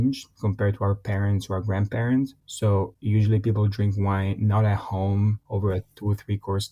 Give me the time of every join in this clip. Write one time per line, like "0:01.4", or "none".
0:05.4